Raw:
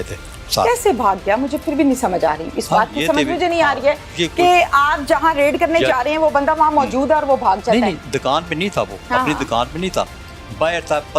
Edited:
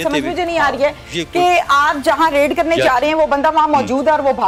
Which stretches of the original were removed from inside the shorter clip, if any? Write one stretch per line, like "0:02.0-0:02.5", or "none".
none